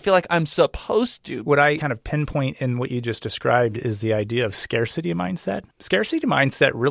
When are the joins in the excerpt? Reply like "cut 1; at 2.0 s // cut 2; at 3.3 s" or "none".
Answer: cut 1; at 1.7 s // cut 2; at 5.7 s